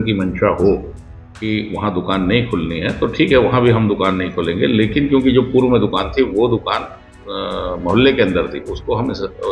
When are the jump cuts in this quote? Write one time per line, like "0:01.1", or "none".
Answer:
none